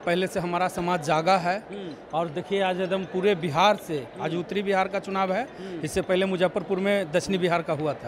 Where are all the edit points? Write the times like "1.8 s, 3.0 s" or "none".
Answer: none

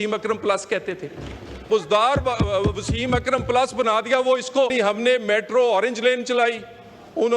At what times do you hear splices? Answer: 1.7 s, 4.7 s

